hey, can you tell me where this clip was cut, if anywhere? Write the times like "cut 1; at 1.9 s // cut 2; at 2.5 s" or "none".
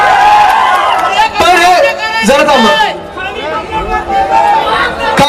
none